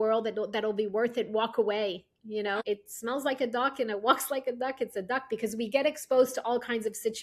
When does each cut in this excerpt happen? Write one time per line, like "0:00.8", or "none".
0:02.6

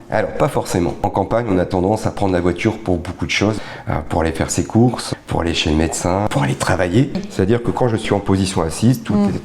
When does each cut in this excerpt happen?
0:01.0
0:03.6
0:05.0
0:06.3
0:07.3

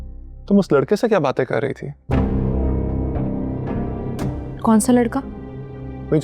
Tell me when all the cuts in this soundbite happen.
none

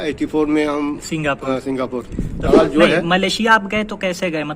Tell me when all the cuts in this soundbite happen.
0:02.5

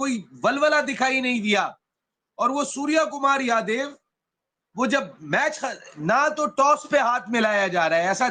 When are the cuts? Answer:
none

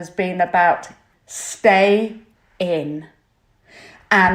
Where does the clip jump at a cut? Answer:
none

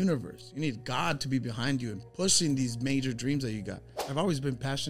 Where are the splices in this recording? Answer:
0:04.0

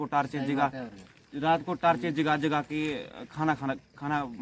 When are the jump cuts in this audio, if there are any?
none

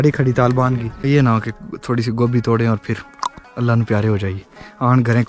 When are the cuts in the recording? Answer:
0:00.9

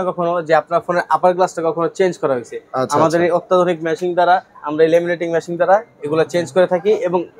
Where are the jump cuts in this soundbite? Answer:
none

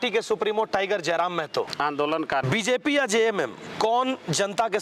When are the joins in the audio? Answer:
0:01.7
0:02.4

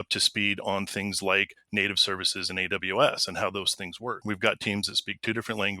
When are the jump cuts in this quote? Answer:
0:04.2

